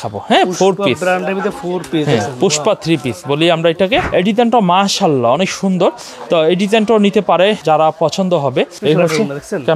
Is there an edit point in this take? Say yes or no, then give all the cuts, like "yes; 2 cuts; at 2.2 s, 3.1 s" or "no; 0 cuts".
yes; 3 cuts; at 4.1 s, 7.6 s, 8.8 s